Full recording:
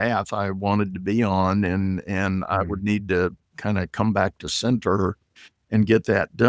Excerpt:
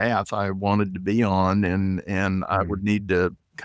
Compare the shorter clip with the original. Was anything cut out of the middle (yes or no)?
no